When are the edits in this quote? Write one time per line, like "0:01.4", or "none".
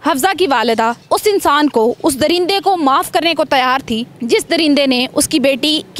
0:01.0
0:04.1